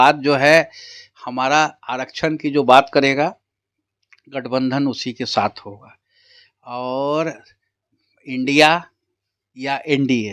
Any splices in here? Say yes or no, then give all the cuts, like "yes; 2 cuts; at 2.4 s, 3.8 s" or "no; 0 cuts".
no; 0 cuts